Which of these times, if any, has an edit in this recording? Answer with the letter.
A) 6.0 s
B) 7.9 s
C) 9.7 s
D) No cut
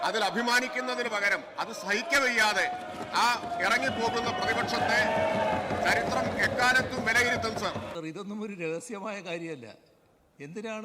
B